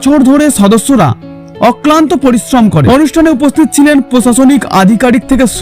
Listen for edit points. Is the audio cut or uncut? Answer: cut